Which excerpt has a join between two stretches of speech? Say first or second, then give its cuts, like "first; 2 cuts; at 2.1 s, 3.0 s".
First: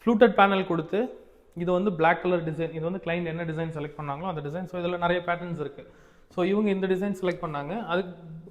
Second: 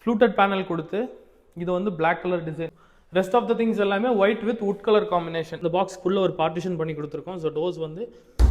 second; 2 cuts; at 2.7 s, 5.5 s